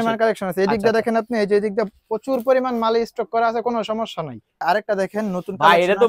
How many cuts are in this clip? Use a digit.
1